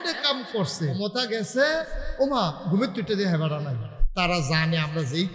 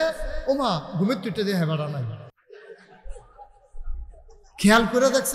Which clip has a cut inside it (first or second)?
first